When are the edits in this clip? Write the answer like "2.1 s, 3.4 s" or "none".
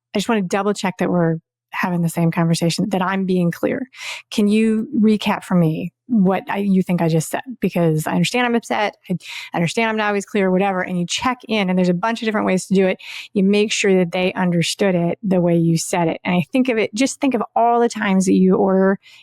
2.8 s, 6.0 s